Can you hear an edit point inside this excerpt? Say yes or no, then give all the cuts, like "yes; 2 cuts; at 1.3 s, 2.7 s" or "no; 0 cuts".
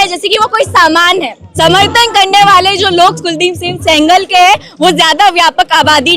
yes; 1 cut; at 1.4 s